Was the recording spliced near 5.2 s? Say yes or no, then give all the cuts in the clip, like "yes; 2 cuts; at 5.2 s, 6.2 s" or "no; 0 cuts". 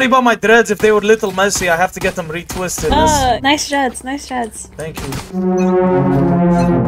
yes; 2 cuts; at 3.4 s, 5.2 s